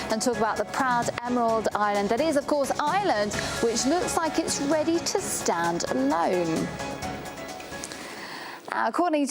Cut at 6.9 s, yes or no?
yes